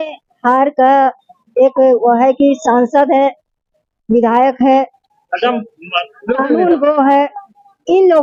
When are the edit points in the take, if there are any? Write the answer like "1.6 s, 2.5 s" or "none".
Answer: none